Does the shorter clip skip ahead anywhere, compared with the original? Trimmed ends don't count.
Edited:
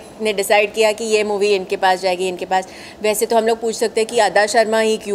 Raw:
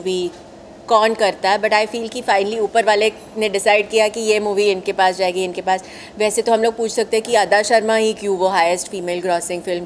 no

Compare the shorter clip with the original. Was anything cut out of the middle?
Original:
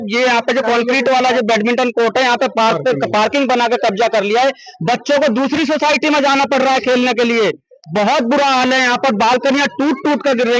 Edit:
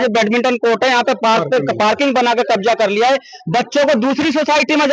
no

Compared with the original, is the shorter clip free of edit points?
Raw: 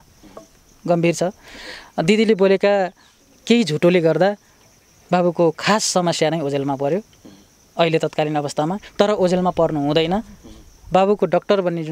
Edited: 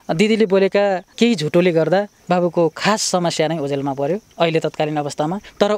no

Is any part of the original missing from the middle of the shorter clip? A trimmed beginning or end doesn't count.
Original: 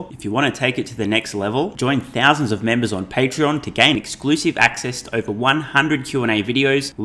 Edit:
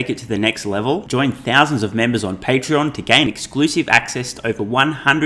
no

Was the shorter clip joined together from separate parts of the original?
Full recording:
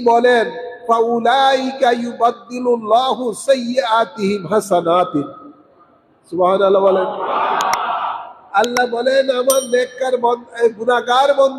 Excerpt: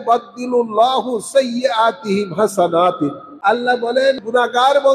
yes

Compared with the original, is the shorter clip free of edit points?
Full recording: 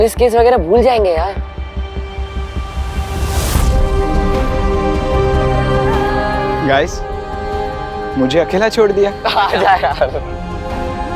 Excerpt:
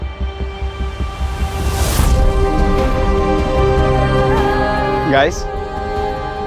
yes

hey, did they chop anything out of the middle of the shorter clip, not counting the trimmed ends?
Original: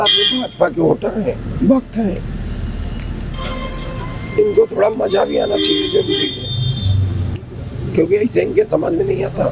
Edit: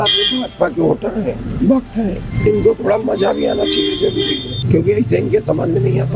yes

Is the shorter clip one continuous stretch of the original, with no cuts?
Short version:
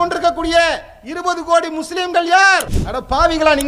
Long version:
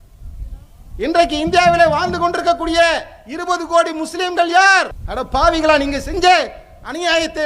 yes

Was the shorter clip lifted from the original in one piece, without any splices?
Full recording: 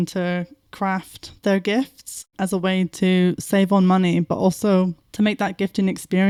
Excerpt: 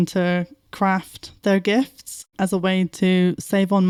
yes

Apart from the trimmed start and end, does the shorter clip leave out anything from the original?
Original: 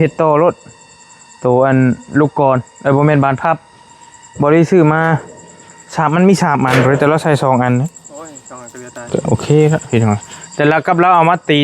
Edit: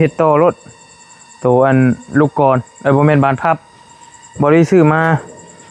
no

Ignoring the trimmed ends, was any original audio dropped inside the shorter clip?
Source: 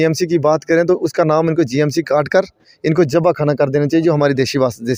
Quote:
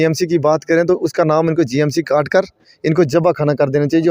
no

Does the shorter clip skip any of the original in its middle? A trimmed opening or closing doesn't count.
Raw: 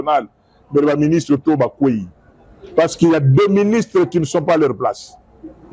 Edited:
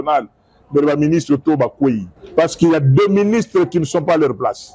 yes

